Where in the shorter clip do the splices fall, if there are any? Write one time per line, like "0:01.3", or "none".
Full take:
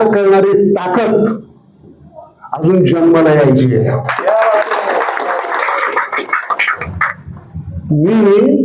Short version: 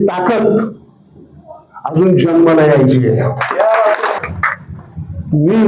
0:04.2